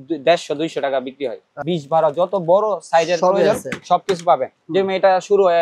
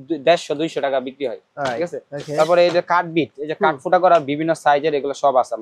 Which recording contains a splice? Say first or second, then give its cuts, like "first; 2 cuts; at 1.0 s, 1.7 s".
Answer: first; 1 cut; at 1.5 s